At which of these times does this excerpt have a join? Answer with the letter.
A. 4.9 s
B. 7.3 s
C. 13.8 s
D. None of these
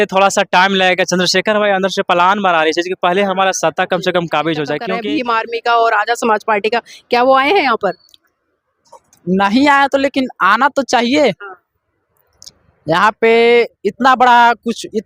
A